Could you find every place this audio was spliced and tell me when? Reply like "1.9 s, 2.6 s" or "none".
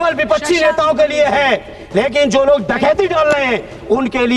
none